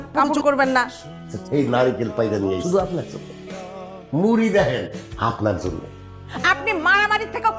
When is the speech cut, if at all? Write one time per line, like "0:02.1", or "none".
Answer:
0:01.4
0:06.2